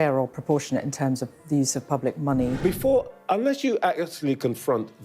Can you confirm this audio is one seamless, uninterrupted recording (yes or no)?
no